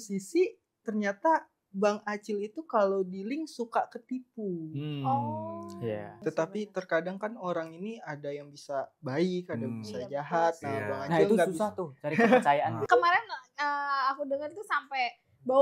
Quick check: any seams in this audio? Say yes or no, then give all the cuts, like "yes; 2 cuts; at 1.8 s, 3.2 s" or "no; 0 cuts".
yes; 2 cuts; at 6.1 s, 12.8 s